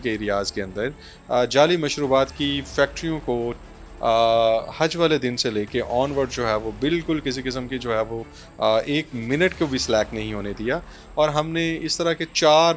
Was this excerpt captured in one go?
yes; 0 cuts

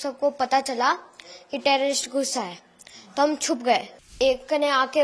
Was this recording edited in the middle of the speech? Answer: yes; 1 cut; at 4.1 s

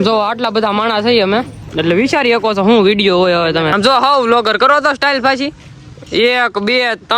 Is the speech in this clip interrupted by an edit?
yes; 2 cuts; at 1.6 s, 3.7 s

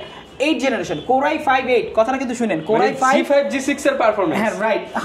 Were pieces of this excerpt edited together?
no; 0 cuts

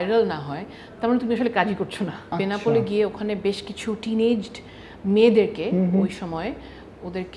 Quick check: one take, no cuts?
no; 1 cut; at 2.2 s

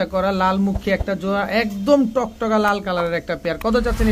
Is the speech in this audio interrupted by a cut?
no; 0 cuts

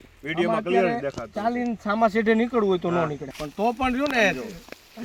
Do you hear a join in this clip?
yes; 1 cut; at 3.2 s

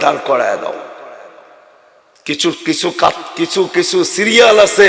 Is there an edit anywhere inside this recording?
no; 0 cuts

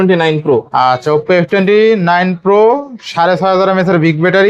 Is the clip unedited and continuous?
yes; 0 cuts

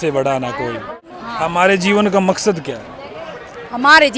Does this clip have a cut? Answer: yes; 1 cut; at 1.1 s

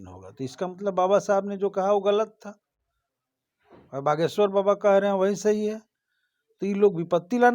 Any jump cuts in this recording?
no; 0 cuts

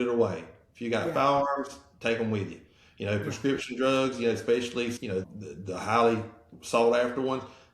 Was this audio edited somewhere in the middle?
yes; 1 cut; at 5.1 s

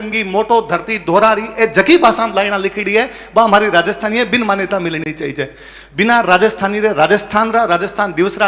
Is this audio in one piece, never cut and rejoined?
yes; 0 cuts

